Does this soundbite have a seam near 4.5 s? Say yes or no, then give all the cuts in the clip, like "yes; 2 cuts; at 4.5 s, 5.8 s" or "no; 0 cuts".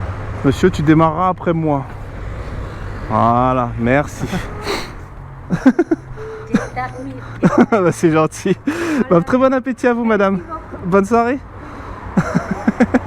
yes; 1 cut; at 4.5 s